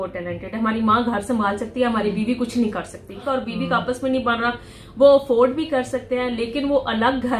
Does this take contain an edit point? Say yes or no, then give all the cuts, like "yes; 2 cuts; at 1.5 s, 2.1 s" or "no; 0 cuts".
yes; 1 cut; at 3.2 s